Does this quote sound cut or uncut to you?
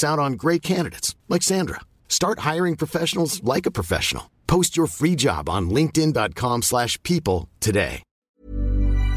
cut